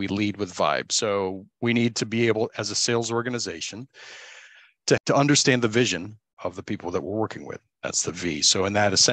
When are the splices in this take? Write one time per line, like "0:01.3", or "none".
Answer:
0:01.4
0:05.0
0:06.4